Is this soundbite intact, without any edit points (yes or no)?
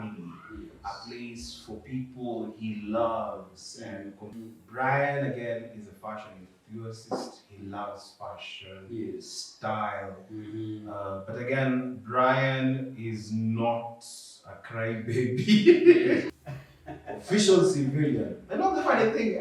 no